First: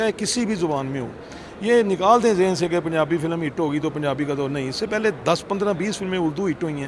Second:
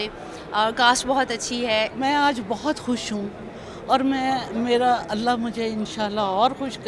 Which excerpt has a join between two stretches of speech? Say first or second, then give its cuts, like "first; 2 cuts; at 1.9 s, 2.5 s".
second; 1 cut; at 1.9 s